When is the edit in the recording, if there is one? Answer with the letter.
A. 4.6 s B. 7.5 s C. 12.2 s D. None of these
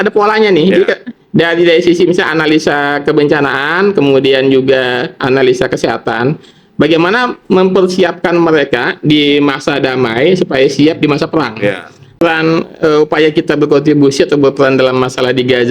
C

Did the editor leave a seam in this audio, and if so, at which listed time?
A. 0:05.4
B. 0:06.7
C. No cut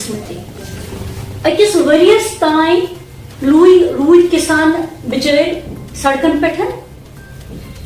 C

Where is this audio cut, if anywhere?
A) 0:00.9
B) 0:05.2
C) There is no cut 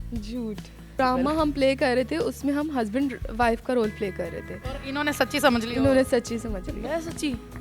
A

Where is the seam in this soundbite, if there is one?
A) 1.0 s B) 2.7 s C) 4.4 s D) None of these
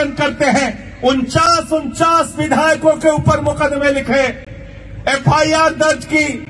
D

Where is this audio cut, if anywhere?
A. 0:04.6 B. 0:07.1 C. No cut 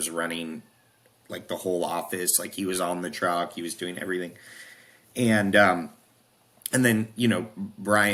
C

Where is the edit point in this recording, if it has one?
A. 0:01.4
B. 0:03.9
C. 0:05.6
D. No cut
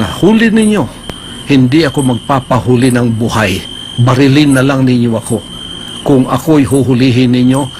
D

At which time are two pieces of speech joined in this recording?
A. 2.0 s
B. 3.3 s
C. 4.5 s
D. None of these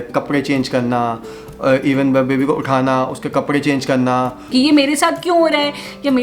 C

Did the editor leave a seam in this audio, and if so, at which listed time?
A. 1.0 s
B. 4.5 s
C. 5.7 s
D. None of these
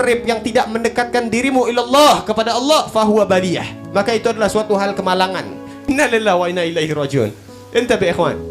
C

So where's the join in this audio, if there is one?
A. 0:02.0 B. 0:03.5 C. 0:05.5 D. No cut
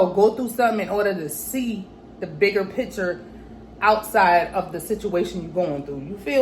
D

